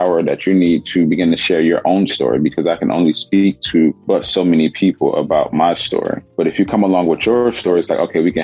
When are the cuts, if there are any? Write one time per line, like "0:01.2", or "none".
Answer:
0:04.0
0:06.2